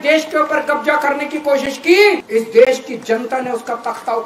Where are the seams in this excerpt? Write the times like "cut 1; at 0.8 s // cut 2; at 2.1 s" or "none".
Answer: cut 1; at 2.2 s